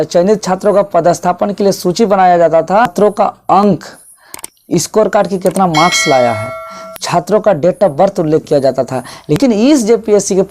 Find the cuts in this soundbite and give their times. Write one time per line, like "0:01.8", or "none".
0:02.9
0:09.4